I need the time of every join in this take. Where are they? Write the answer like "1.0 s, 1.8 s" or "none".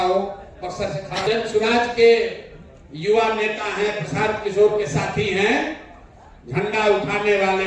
1.2 s